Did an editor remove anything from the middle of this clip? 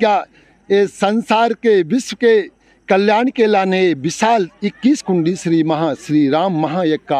no; 0 cuts

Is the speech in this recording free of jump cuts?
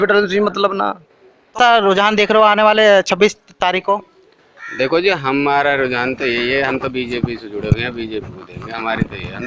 no; 1 cut; at 1.5 s

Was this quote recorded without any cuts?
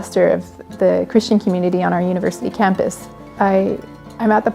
no; 1 cut; at 3.2 s

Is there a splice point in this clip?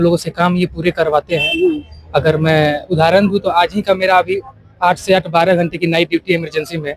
no; 0 cuts

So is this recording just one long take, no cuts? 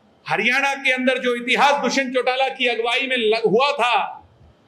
yes; 0 cuts

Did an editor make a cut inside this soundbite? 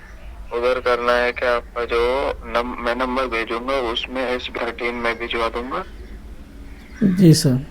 yes; 1 cut; at 4.5 s

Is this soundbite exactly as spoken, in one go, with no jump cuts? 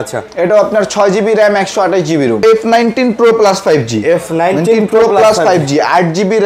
no; 1 cut; at 2.4 s

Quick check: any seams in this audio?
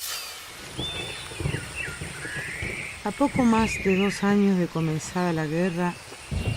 no; 0 cuts

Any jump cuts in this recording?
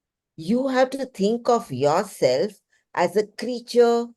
no; 0 cuts

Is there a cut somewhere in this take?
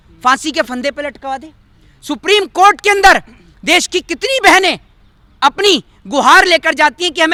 no; 0 cuts

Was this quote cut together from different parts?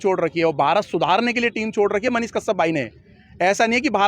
no; 0 cuts

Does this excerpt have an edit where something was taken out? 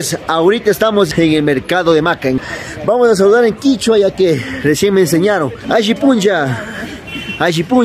yes; 3 cuts; at 1.1 s, 2.4 s, 5.6 s

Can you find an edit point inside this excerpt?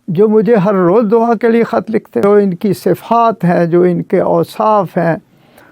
yes; 1 cut; at 2.2 s

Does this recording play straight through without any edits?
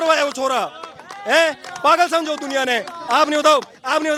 yes; 0 cuts

